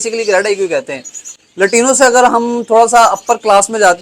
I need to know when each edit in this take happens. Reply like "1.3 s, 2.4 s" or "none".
1.2 s